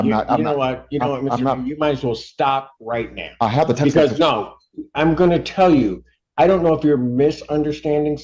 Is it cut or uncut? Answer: uncut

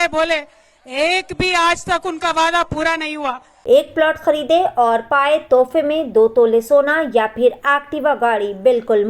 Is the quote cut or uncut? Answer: cut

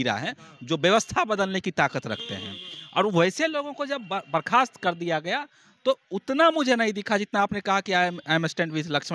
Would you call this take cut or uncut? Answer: uncut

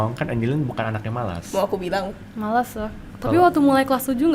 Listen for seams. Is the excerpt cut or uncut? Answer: cut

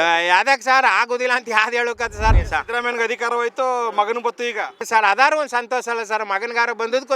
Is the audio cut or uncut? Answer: cut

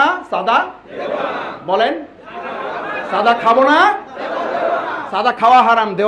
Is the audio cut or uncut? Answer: uncut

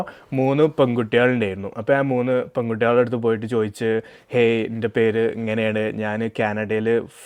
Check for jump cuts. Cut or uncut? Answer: uncut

